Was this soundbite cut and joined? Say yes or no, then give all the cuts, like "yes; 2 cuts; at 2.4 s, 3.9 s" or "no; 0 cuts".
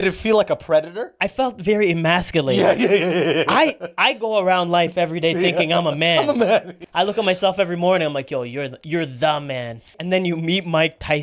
yes; 2 cuts; at 6.8 s, 10.0 s